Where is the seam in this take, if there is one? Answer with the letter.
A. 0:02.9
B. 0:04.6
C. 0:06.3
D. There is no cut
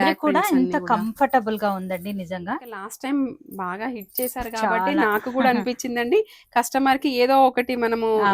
A